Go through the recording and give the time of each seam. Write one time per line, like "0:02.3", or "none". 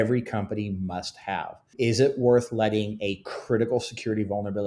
0:01.7